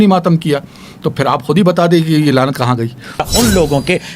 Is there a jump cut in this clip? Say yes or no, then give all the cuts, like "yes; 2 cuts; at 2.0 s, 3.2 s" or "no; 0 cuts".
yes; 1 cut; at 3.2 s